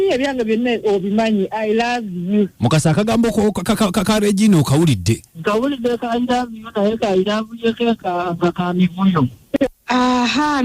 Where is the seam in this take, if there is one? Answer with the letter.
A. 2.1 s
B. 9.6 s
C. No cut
B